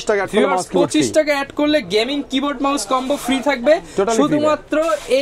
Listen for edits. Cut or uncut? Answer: uncut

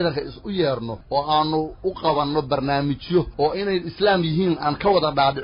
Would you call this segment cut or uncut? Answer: cut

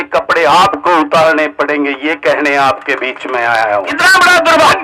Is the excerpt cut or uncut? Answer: cut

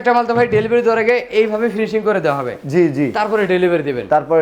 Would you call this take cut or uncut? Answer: uncut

